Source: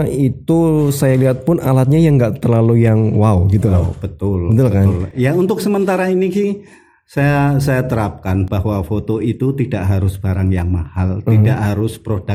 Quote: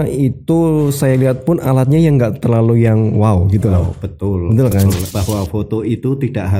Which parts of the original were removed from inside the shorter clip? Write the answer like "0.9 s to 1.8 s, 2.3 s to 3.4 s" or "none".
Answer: 5.1 s to 8.5 s